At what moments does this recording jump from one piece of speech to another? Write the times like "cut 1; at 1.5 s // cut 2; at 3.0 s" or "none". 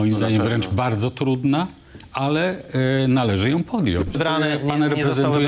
cut 1; at 4.2 s